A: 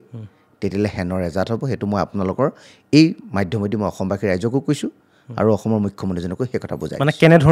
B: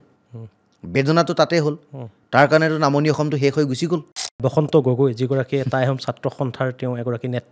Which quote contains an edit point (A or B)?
B